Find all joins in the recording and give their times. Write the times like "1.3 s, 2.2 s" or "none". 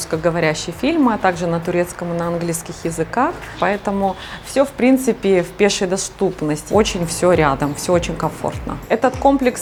none